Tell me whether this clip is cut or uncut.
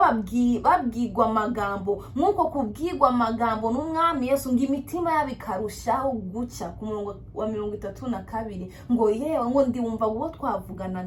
uncut